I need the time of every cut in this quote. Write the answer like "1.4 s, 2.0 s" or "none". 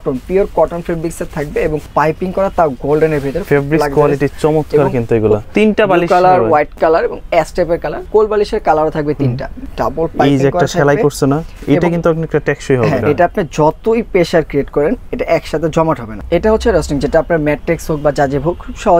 1.9 s, 5.4 s, 8.0 s, 9.5 s, 13.0 s, 16.2 s

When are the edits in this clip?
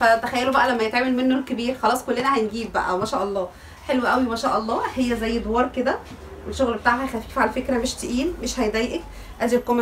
none

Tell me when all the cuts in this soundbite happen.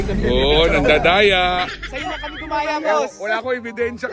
1.8 s

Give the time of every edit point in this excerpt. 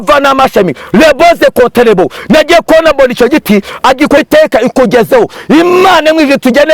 4.2 s

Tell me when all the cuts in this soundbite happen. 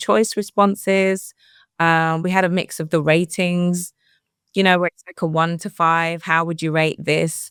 none

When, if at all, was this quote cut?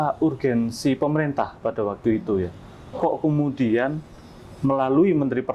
none

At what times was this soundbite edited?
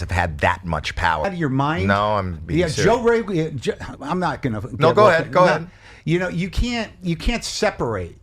1.2 s

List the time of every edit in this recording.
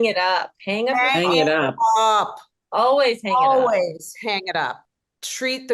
4.8 s

